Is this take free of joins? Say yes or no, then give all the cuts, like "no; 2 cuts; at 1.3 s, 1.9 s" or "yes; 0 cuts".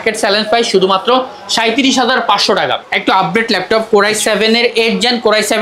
no; 1 cut; at 2.8 s